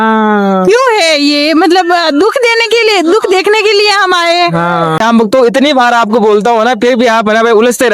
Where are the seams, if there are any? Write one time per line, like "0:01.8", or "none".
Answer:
0:05.0